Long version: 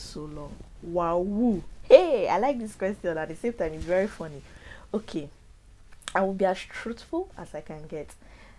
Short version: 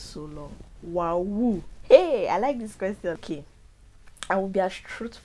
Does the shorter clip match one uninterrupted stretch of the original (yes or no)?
no